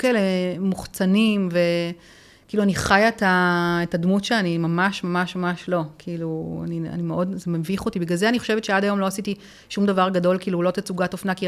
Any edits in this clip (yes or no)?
no